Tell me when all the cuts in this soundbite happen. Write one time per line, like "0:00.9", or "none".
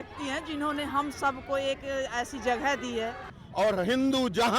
0:03.3